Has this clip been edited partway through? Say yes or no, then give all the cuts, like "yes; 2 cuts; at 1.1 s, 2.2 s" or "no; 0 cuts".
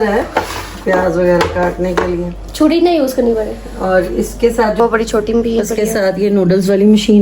yes; 1 cut; at 4.8 s